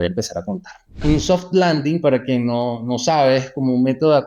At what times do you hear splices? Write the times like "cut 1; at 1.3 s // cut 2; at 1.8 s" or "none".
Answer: cut 1; at 1.0 s